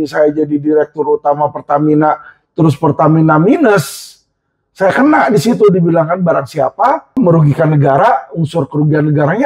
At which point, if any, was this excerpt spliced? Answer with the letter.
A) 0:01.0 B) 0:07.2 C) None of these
B